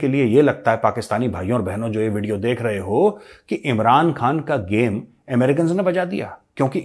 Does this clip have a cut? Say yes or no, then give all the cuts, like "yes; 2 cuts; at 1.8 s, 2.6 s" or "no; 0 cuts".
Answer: no; 0 cuts